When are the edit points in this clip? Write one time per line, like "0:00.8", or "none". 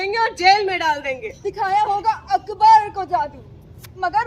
0:01.3